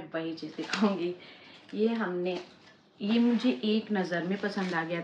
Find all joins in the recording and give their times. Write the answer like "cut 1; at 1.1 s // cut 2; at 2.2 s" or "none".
none